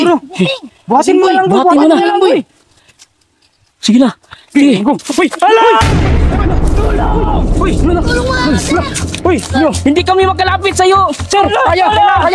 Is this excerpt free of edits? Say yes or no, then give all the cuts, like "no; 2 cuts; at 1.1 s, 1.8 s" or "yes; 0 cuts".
yes; 0 cuts